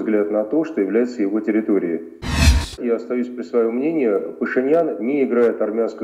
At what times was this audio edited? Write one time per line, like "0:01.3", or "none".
0:02.7